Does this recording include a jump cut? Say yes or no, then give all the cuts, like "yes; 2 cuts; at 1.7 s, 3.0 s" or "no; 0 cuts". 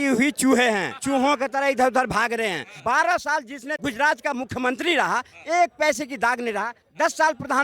yes; 3 cuts; at 0.9 s, 2.7 s, 3.7 s